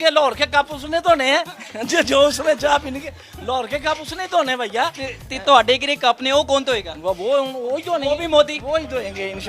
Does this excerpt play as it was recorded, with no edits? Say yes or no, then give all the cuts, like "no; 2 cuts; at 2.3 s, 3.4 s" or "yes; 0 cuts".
yes; 0 cuts